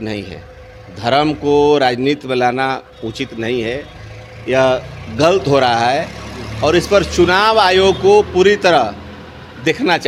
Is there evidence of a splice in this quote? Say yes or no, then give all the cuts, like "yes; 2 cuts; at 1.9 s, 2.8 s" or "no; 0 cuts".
no; 0 cuts